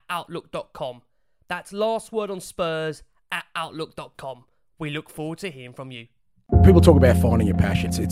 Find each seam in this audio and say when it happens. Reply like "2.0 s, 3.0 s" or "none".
6.4 s

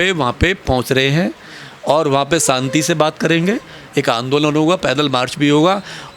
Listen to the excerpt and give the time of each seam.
none

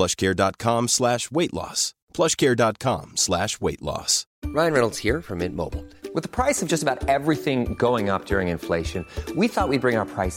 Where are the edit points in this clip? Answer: 4.4 s

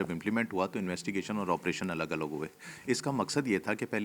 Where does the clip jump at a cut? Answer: none

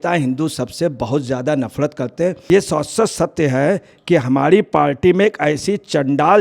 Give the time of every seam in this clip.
2.5 s

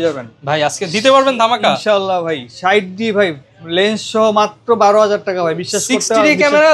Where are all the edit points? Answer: none

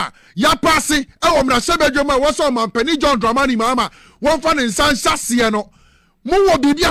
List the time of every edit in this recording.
none

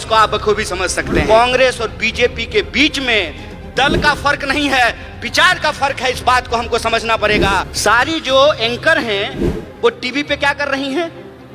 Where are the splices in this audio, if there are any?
1.2 s, 7.7 s

